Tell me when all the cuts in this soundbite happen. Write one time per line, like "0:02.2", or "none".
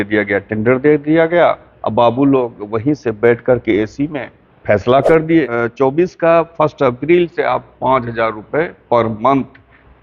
0:05.5